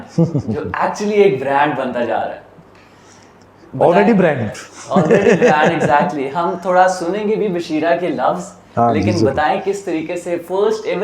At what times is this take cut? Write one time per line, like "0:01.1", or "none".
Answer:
none